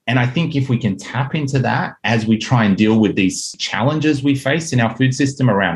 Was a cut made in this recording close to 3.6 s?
yes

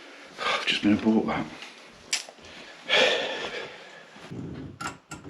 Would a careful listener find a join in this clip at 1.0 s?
no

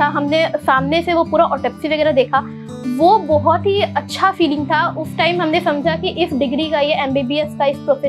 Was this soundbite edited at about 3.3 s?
no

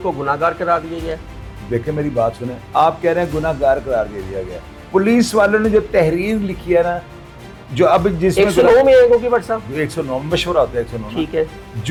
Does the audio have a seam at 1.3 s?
no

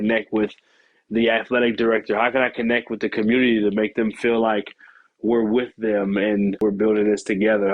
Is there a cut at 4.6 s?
no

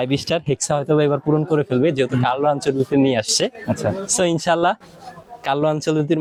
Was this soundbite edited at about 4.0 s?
no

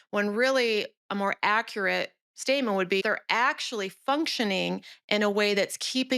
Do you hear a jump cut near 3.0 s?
yes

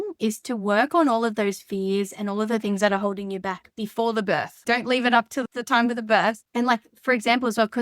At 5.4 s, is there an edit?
yes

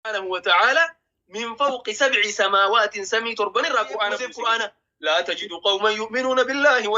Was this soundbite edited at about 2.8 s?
no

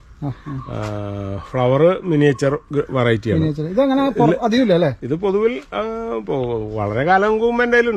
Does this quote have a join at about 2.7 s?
no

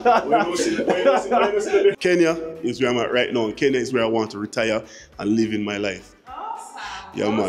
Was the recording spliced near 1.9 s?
yes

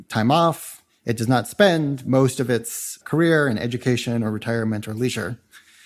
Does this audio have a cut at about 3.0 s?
yes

